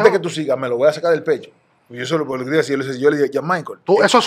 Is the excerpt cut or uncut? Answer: uncut